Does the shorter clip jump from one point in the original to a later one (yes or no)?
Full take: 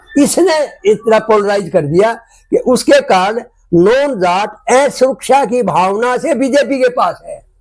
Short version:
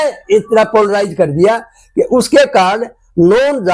no